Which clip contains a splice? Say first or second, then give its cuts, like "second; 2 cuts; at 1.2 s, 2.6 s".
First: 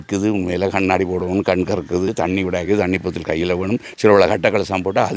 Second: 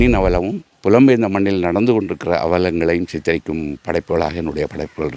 first; 1 cut; at 2.1 s